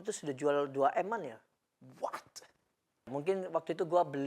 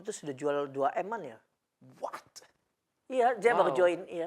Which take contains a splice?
first; 1 cut; at 3.1 s

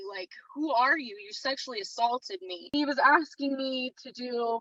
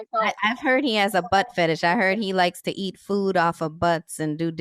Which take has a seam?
first; 1 cut; at 2.6 s

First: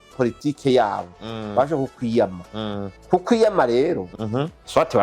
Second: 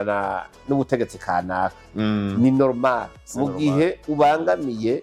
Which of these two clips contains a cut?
first; 1 cut; at 4.1 s

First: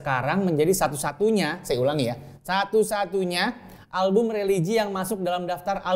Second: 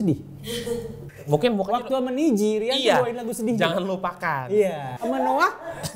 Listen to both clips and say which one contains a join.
second; 1 cut; at 4.9 s

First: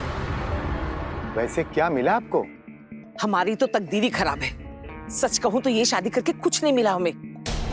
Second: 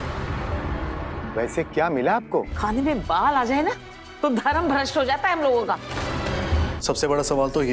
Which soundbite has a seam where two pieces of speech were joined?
second; 2 cuts; at 2.5 s, 6.8 s

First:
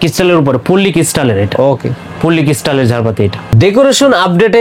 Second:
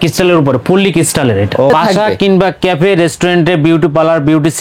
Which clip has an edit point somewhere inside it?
second; 1 cut; at 1.7 s

